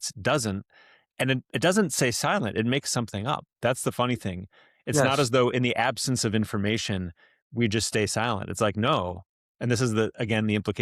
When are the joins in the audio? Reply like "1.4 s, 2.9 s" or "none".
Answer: none